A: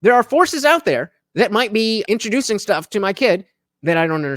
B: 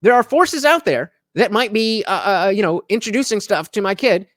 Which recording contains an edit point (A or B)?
A